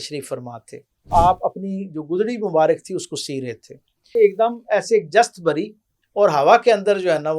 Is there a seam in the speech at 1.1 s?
yes; 2 cuts; at 1.1 s, 4.1 s

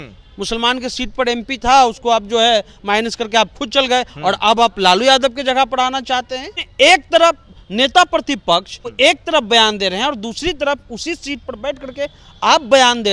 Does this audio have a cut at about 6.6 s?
yes; 1 cut; at 6.6 s

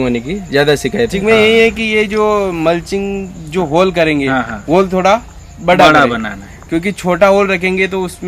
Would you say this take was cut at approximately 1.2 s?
yes; 1 cut; at 1.2 s

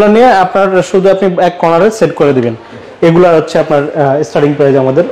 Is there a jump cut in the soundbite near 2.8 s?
yes; 1 cut; at 2.8 s

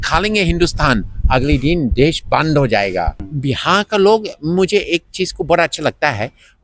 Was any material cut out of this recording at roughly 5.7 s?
no; 1 cut; at 3.2 s

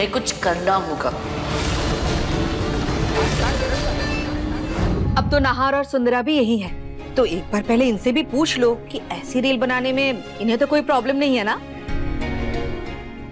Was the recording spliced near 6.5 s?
no; 1 cut; at 4.9 s

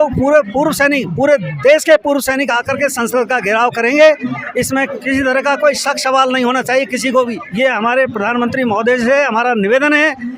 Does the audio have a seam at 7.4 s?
yes; 1 cut; at 7.4 s

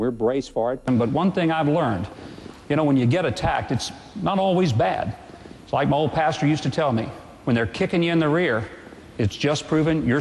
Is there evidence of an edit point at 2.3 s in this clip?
no; 1 cut; at 0.9 s

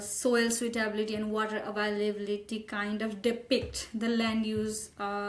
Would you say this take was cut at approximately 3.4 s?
no; 0 cuts

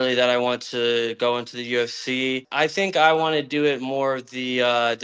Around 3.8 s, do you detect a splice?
no; 1 cut; at 2.4 s

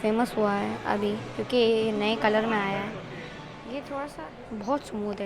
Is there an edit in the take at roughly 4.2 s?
yes; 1 cut; at 4.2 s

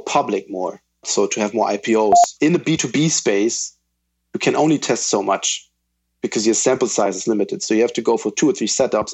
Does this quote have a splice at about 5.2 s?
no; 3 cuts; at 1.0 s, 2.3 s, 7.6 s

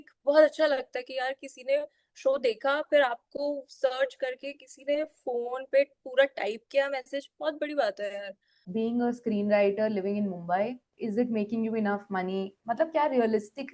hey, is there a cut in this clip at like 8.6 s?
yes; 2 cuts; at 8.6 s, 10.9 s

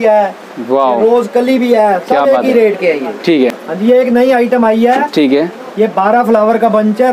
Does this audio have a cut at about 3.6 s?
yes; 1 cut; at 3.6 s

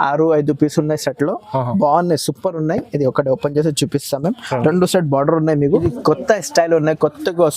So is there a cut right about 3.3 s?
no; 1 cut; at 5.8 s

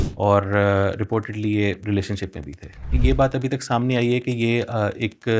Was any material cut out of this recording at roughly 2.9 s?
yes; 1 cut; at 2.9 s

